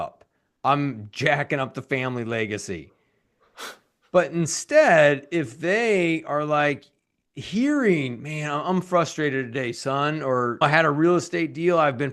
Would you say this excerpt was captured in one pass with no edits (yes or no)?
no